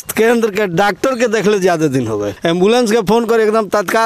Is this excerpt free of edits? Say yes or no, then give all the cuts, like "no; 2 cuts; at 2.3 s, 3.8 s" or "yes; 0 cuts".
no; 1 cut; at 2.3 s